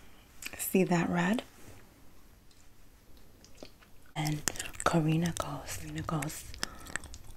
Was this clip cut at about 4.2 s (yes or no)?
yes